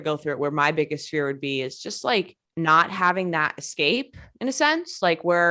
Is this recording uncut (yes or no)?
no